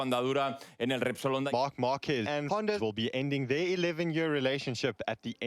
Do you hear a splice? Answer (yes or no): yes